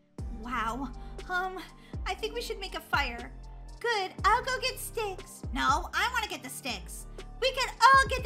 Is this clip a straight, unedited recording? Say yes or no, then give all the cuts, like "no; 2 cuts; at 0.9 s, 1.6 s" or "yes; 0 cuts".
yes; 0 cuts